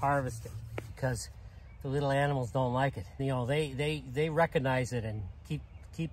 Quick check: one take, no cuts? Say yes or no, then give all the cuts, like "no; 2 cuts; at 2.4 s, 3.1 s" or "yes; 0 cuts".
no; 2 cuts; at 1.0 s, 3.2 s